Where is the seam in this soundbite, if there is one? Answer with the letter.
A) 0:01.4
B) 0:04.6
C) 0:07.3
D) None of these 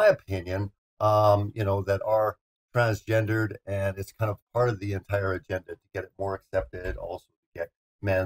B